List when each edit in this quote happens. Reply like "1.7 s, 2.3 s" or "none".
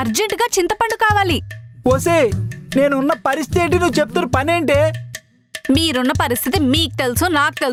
none